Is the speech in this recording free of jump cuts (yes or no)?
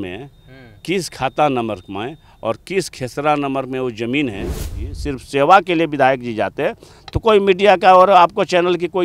no